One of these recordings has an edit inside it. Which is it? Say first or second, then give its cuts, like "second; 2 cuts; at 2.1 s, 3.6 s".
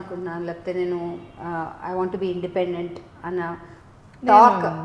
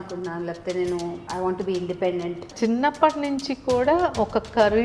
second; 2 cuts; at 1.2 s, 2.5 s